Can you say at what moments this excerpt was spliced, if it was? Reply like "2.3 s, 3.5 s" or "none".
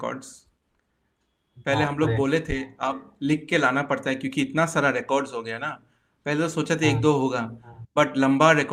none